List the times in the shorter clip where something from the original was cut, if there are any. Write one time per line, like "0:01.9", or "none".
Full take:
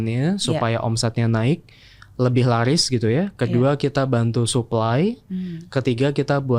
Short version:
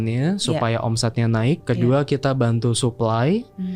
0:01.6